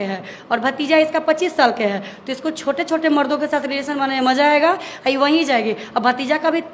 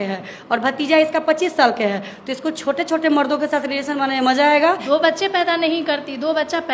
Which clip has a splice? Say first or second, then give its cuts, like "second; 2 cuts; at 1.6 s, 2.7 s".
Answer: second; 1 cut; at 4.8 s